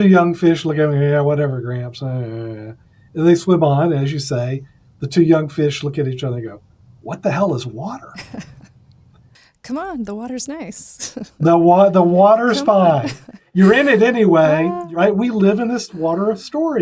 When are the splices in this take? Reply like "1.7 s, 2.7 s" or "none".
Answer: 9.1 s, 13.4 s, 14.8 s, 15.9 s